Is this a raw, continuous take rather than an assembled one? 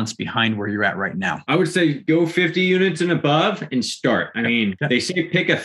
no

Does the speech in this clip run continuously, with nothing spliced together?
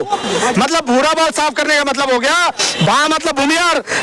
yes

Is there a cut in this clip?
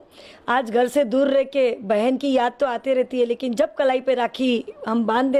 no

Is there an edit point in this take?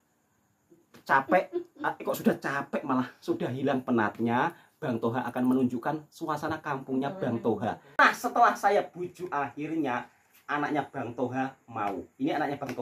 yes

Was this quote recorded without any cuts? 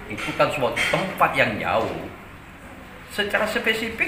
yes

